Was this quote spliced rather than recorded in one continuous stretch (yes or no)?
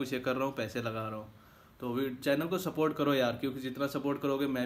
no